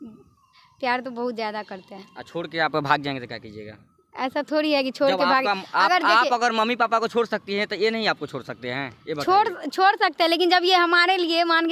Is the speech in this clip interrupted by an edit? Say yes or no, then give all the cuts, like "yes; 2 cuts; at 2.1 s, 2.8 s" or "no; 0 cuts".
no; 0 cuts